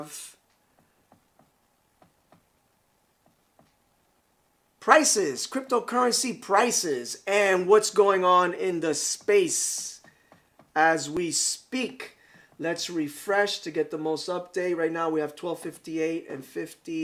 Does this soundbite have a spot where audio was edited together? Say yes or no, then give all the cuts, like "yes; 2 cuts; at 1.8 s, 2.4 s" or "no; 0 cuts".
no; 0 cuts